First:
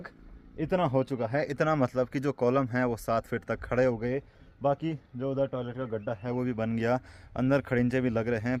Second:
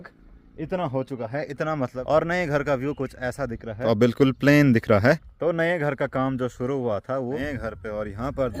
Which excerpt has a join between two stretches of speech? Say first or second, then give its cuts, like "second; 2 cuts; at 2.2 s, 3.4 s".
second; 4 cuts; at 2.0 s, 3.8 s, 5.4 s, 7.4 s